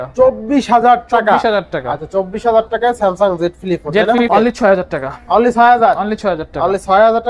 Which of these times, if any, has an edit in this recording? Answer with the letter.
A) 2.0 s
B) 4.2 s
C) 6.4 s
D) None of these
B